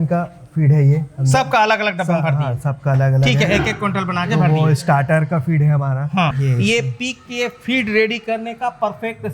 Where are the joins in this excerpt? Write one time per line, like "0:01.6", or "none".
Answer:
0:06.4